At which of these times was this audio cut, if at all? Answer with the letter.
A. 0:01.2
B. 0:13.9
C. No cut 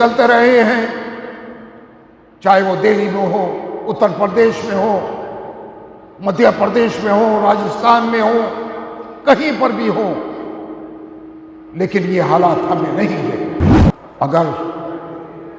B